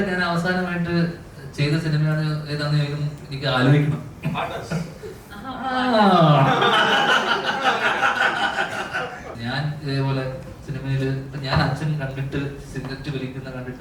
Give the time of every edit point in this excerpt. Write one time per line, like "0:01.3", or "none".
0:09.3